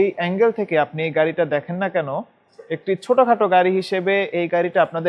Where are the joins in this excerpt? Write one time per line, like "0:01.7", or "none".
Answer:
none